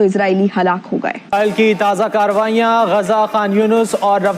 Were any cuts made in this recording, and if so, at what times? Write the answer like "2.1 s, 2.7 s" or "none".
1.3 s